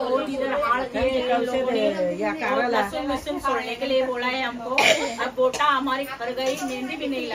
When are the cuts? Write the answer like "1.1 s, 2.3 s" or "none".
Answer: none